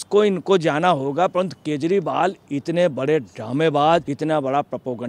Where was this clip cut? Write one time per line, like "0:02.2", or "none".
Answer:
0:04.1